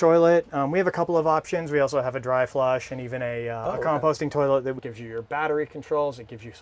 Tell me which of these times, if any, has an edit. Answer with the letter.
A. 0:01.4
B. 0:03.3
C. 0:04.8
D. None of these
C